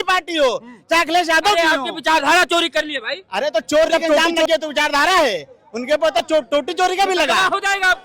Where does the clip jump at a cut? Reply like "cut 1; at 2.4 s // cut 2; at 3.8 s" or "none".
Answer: cut 1; at 4.3 s